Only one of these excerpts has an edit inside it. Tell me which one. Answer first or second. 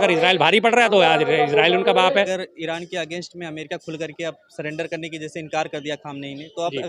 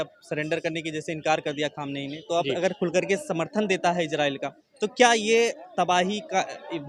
first